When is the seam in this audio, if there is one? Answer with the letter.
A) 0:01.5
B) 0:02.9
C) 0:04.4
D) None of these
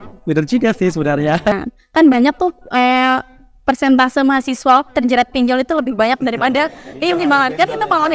A